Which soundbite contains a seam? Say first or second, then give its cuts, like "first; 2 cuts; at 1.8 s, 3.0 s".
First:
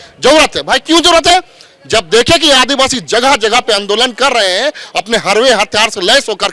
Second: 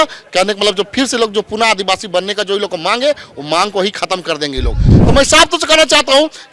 second; 1 cut; at 4.9 s